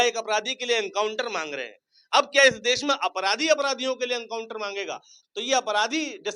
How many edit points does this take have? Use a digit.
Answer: 1